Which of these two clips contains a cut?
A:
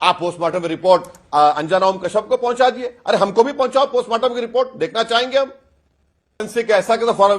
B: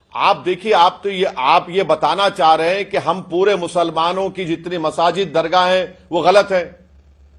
A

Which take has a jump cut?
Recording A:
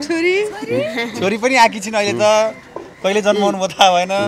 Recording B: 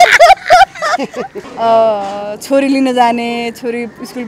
B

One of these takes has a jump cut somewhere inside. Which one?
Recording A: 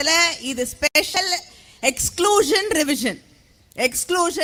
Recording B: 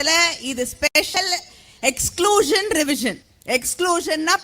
B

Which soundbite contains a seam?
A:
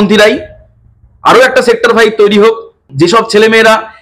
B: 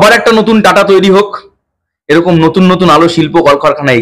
A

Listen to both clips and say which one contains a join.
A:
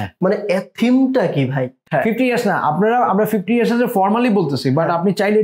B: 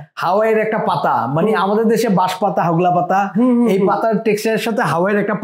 A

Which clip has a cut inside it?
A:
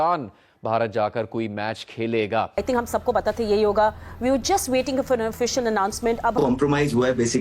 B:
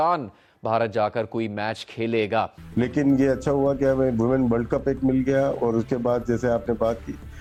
A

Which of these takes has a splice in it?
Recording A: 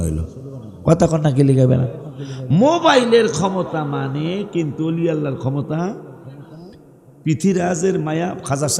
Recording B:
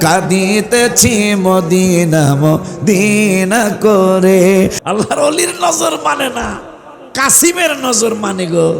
B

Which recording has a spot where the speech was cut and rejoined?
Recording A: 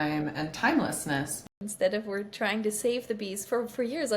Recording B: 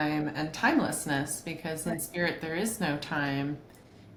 A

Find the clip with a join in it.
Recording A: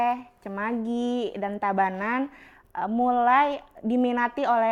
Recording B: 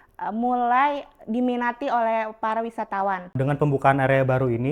B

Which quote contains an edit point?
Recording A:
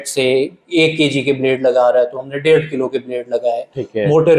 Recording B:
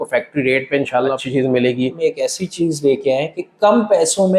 B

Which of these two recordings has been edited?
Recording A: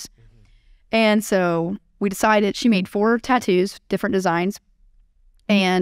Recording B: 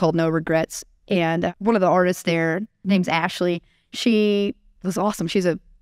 B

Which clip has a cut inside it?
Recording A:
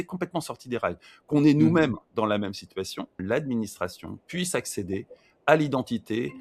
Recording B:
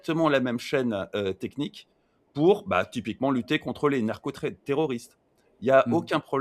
A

